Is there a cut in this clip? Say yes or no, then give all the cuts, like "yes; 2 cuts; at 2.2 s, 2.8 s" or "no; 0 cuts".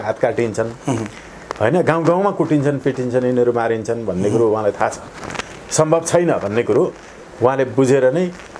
no; 0 cuts